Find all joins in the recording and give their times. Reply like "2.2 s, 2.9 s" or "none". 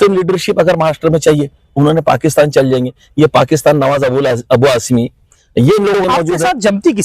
6.0 s